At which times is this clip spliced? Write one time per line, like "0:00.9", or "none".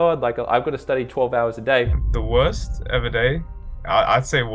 0:02.0